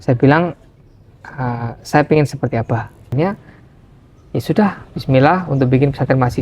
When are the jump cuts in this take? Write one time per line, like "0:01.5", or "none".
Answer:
0:03.1